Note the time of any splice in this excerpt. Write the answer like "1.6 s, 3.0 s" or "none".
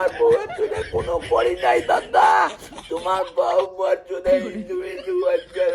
none